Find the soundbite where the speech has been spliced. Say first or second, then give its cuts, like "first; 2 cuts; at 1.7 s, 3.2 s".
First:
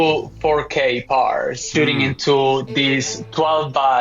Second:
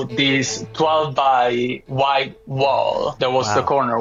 first; 1 cut; at 1.6 s